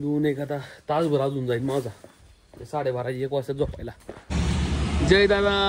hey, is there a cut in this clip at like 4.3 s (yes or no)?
yes